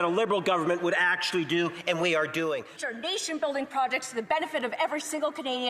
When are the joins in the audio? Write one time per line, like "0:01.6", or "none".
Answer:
0:02.6